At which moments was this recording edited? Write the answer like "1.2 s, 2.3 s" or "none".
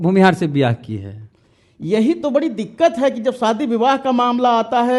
none